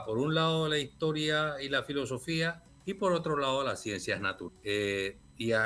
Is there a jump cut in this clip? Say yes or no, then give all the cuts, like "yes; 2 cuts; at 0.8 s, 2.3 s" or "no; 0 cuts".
yes; 2 cuts; at 2.7 s, 4.4 s